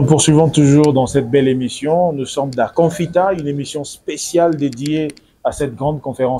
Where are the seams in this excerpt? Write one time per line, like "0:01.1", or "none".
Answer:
0:02.7